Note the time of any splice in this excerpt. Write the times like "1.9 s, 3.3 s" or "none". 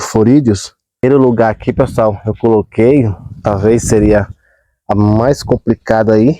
1.0 s